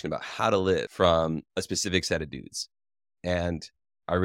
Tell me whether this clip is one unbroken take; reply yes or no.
yes